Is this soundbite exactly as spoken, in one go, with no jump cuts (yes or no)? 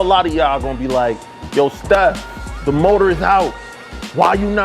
yes